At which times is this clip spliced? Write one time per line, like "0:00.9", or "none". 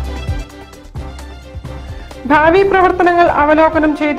0:01.5